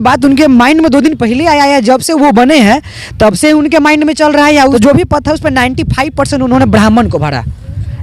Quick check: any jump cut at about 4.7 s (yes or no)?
yes